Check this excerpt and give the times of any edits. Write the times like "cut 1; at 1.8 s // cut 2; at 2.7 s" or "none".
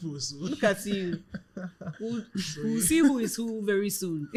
none